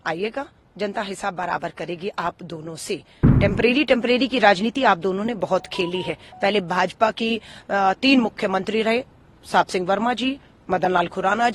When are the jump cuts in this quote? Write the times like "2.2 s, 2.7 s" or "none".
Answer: 3.2 s

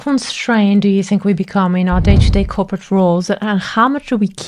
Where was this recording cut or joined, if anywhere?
none

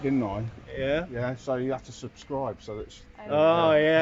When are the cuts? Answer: none

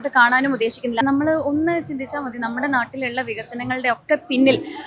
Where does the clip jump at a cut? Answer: 1.0 s

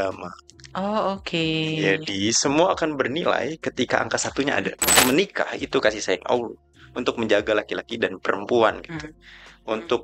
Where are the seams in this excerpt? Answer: 4.9 s

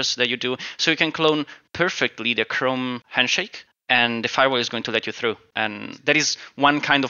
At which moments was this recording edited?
3.2 s, 5.5 s

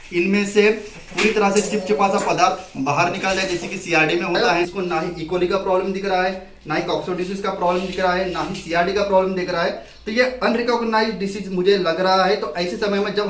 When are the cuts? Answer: 4.7 s

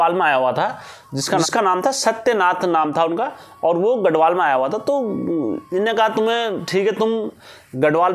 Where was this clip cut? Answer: none

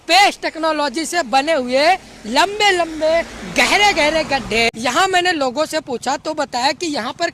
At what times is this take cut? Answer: 4.7 s

